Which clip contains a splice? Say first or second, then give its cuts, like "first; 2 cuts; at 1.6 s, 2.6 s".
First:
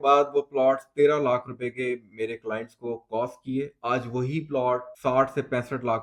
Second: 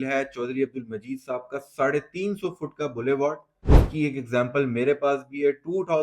second; 1 cut; at 3.5 s